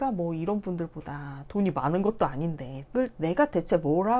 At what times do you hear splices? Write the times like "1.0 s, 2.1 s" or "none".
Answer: 2.8 s